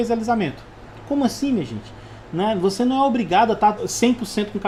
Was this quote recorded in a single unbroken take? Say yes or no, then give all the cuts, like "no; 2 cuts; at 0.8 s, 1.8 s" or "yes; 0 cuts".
yes; 0 cuts